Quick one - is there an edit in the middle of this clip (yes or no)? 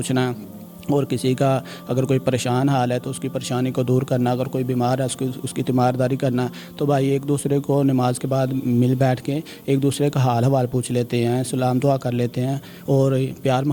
no